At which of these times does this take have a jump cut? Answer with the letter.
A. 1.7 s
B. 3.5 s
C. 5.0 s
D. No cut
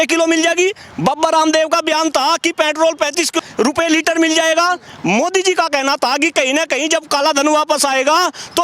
B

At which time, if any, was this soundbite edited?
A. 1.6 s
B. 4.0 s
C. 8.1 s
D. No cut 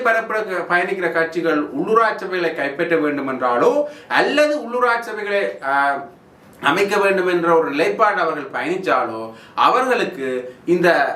D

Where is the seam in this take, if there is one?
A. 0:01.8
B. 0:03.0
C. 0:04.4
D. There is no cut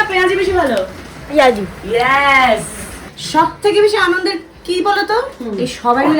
D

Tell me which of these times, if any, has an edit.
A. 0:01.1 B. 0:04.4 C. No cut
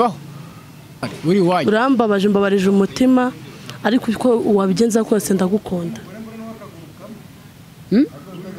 A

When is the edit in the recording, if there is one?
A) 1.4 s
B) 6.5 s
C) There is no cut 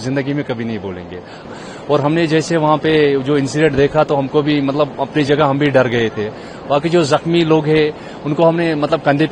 A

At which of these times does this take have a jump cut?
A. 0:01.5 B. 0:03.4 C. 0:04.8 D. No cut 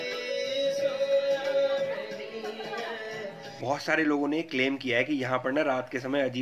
B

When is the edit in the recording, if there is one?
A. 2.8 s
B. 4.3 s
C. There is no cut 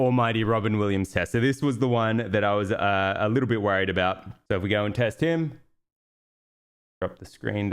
B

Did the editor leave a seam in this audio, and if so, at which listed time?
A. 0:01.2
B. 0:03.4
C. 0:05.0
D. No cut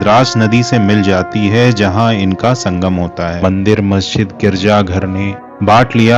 B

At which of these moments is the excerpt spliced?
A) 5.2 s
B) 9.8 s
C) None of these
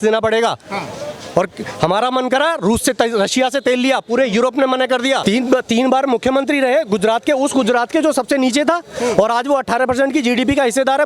A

